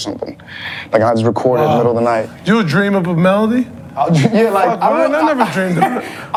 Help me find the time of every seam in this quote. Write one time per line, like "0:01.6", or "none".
none